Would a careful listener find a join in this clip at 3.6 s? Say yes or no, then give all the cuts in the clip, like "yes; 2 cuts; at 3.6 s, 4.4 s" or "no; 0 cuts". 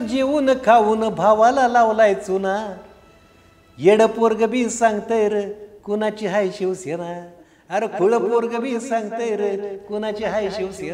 no; 0 cuts